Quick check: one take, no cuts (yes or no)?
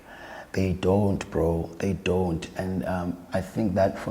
yes